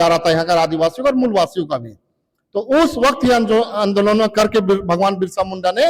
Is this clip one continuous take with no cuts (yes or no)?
yes